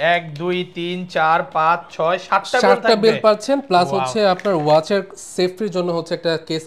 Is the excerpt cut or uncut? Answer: uncut